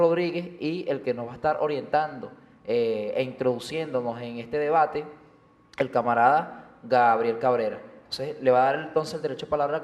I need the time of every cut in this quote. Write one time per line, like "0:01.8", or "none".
0:08.0